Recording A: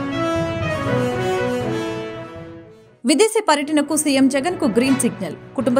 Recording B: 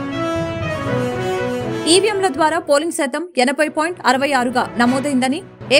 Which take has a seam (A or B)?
B